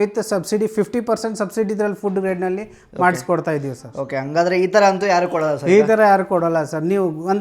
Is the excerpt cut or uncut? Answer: uncut